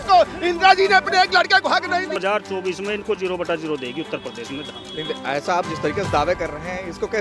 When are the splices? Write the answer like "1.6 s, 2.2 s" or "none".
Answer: 2.2 s